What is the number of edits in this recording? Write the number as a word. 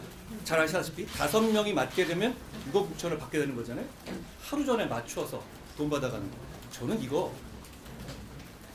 zero